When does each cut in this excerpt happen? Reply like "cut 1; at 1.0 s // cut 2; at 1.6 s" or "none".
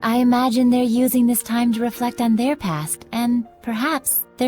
none